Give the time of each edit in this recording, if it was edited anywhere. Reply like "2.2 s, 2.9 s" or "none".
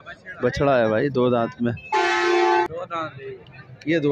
2.7 s

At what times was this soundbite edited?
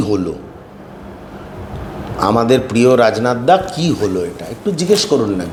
none

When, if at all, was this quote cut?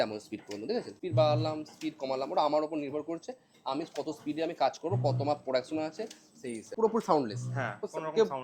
1.0 s, 6.7 s

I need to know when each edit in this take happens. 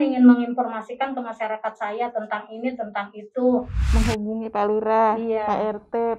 3.8 s

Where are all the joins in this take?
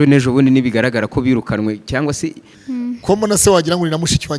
2.5 s

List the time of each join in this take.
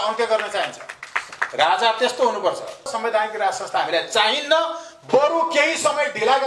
2.9 s

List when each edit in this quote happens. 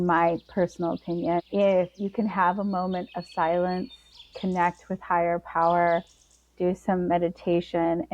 1.5 s

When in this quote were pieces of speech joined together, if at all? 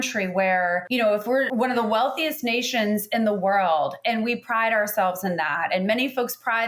1.2 s

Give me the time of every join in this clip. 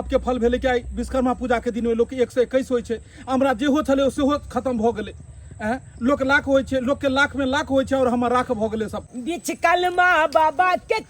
9.1 s

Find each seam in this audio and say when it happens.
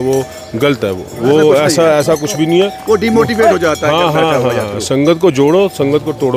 none

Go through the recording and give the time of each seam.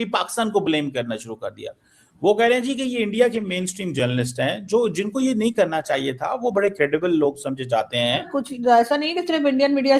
8.3 s

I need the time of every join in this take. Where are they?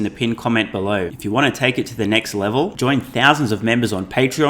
1.1 s

